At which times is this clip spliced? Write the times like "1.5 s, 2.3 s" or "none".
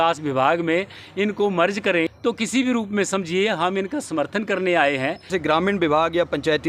2.1 s, 5.3 s